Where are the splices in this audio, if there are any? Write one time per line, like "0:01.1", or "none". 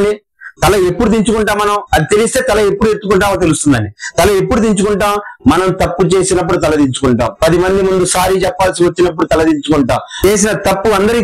0:10.2